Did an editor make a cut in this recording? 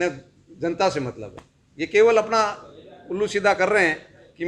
no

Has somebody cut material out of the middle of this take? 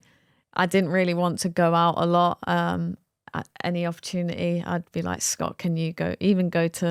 no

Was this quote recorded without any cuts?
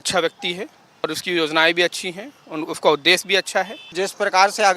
no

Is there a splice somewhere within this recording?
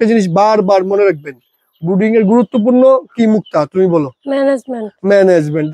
no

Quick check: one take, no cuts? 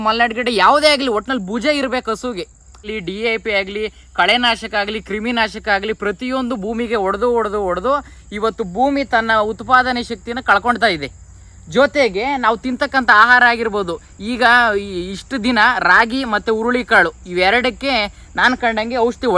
no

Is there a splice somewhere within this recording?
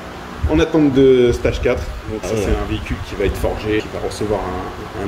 no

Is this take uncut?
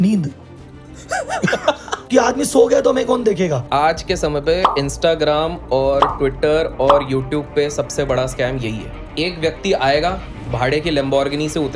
no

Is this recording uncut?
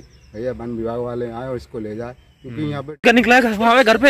no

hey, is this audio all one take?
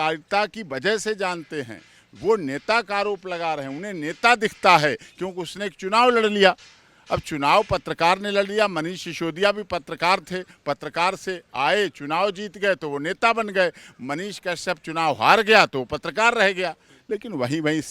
no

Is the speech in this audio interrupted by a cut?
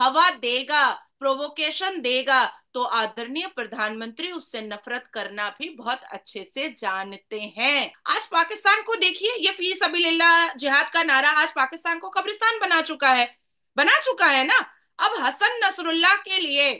yes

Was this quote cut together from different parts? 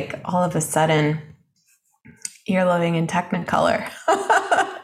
no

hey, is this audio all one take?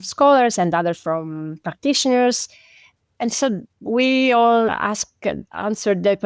no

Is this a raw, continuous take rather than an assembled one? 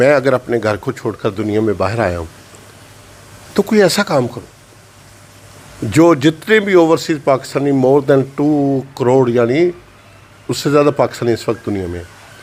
yes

